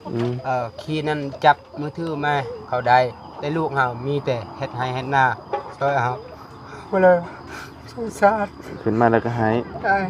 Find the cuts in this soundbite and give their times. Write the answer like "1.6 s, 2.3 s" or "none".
none